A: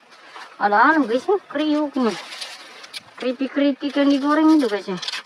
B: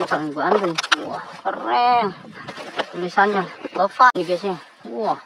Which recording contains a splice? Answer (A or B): B